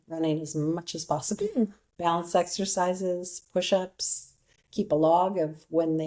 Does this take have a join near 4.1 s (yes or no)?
no